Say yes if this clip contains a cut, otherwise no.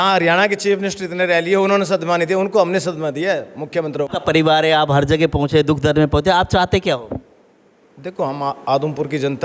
yes